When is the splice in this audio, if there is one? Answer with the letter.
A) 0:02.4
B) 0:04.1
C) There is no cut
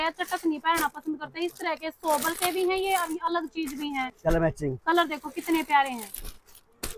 C